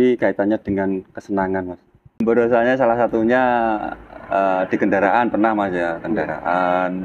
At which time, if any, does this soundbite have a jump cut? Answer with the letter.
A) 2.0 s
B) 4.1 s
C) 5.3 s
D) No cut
A